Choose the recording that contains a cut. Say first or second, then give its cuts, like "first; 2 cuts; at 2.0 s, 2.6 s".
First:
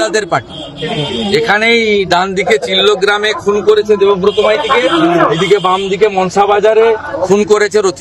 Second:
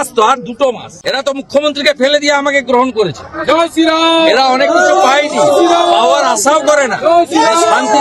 second; 1 cut; at 1.0 s